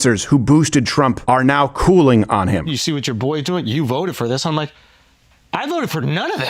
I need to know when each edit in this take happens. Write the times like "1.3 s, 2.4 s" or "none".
1.2 s, 2.7 s